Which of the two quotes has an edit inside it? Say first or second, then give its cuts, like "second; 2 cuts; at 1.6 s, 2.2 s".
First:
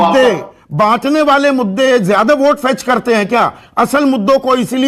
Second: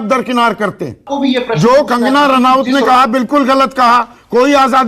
second; 1 cut; at 1.1 s